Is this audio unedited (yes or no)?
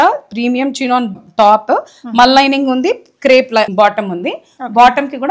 no